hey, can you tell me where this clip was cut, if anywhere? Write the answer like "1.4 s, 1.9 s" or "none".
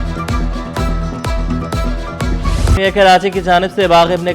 2.8 s